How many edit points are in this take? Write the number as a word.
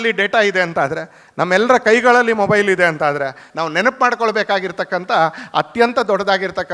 one